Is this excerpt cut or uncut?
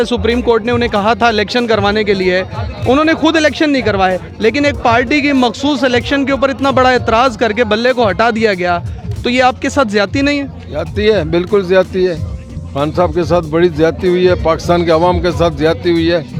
uncut